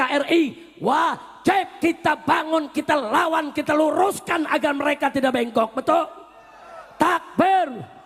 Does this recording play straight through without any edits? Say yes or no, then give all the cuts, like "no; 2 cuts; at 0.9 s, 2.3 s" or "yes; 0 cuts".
yes; 0 cuts